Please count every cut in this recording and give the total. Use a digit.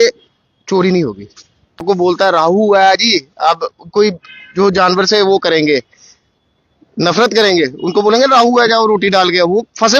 1